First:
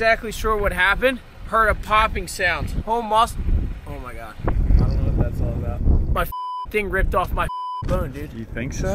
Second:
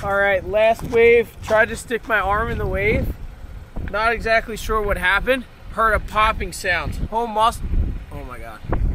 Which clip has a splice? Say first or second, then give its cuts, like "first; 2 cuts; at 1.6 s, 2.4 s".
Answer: first; 1 cut; at 5.8 s